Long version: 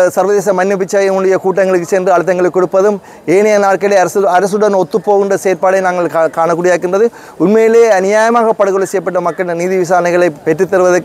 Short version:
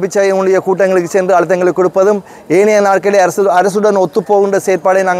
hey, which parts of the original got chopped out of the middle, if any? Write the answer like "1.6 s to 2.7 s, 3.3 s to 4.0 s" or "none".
none